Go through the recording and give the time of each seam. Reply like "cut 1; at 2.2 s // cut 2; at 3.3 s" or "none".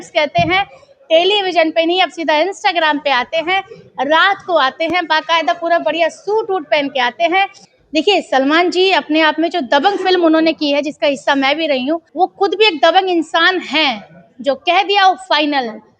cut 1; at 7.6 s // cut 2; at 12.1 s